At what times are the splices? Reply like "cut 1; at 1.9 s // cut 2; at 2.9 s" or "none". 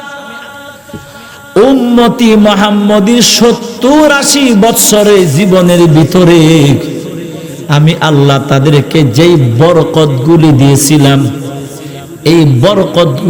none